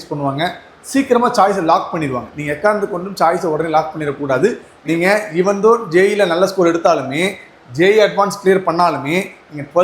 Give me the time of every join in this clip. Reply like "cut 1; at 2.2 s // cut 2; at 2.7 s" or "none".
cut 1; at 4.7 s

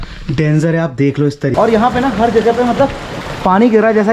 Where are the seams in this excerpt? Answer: cut 1; at 1.5 s

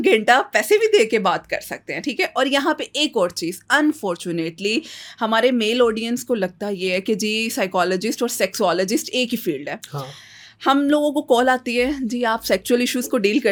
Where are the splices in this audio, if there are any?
none

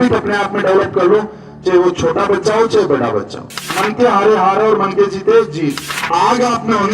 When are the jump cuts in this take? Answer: cut 1; at 3.8 s // cut 2; at 5.9 s

